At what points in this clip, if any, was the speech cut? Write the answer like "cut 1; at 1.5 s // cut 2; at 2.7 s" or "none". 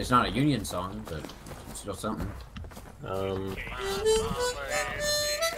cut 1; at 3.7 s